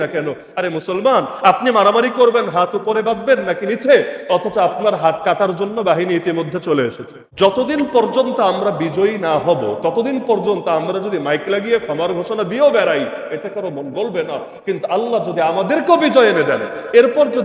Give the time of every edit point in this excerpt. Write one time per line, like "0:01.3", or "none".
0:07.2